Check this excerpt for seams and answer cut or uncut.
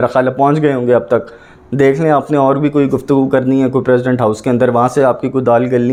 uncut